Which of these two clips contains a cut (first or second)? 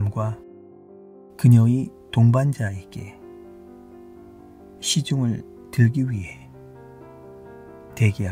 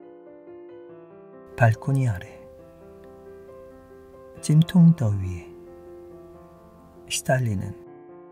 second